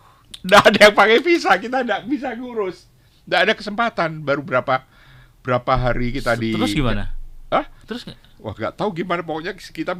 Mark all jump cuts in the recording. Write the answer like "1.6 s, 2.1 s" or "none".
none